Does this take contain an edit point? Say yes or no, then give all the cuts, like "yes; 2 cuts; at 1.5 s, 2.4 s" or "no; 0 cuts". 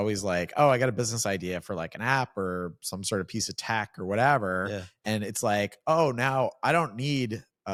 no; 0 cuts